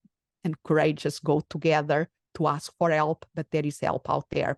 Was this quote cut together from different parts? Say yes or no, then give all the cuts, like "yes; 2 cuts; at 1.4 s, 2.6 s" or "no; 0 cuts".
no; 0 cuts